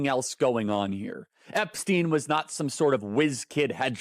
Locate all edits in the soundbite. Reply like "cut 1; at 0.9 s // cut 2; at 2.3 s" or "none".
none

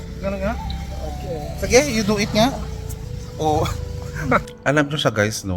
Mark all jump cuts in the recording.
cut 1; at 4.5 s

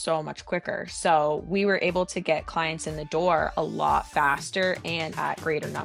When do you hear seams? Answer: none

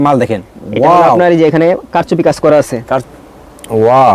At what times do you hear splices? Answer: cut 1; at 3.0 s

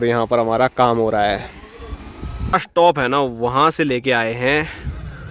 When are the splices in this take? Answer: cut 1; at 2.5 s

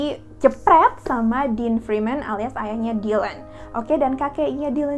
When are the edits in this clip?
none

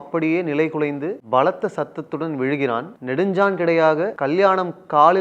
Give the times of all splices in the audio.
cut 1; at 1.2 s // cut 2; at 2.9 s // cut 3; at 4.2 s

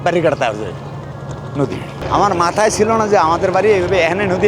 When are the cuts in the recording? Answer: cut 1; at 2.0 s

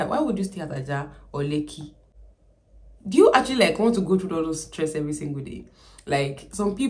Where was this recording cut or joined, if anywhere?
none

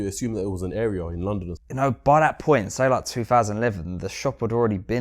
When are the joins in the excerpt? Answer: cut 1; at 1.6 s

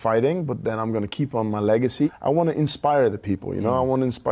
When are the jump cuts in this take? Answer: cut 1; at 2.1 s

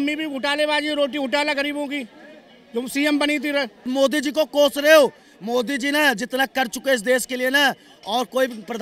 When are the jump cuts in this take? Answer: cut 1; at 3.9 s

